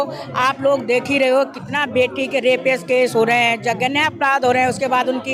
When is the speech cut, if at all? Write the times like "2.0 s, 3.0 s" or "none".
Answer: none